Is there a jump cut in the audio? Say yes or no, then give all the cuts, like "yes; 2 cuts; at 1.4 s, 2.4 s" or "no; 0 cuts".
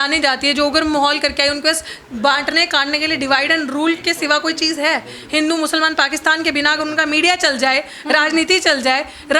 no; 0 cuts